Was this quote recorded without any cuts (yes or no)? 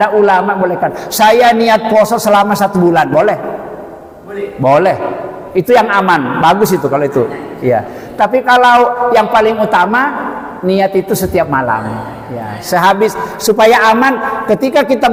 yes